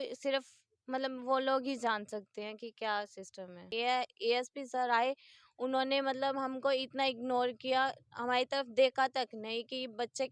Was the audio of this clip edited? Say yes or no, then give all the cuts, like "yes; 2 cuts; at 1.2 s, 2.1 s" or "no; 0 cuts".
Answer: yes; 1 cut; at 3.7 s